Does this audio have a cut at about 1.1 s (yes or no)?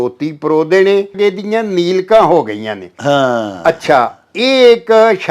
yes